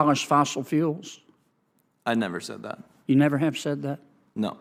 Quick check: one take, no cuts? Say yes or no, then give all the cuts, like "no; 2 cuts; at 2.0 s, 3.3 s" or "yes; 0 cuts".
yes; 0 cuts